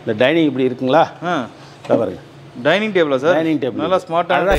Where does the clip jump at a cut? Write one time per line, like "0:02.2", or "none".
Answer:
none